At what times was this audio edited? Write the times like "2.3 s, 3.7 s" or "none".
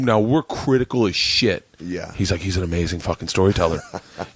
1.7 s